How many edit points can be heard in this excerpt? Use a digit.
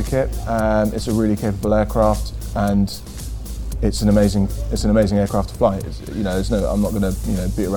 0